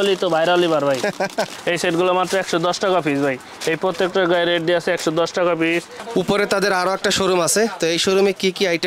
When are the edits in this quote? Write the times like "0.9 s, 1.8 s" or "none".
1.6 s, 6.0 s